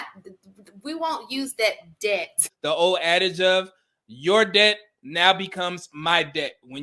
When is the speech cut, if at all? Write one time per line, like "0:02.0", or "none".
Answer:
0:02.5